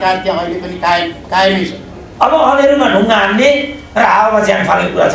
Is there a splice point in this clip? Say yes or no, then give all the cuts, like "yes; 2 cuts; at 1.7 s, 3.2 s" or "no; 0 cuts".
yes; 1 cut; at 2.0 s